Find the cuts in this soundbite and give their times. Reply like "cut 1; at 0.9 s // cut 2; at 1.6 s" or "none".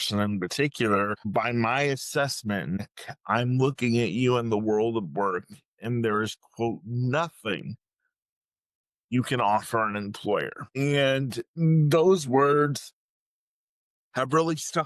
cut 1; at 1.3 s // cut 2; at 2.8 s // cut 3; at 10.6 s